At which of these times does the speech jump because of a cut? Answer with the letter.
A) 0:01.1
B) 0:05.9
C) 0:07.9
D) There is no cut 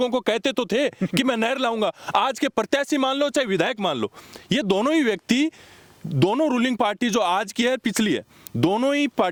D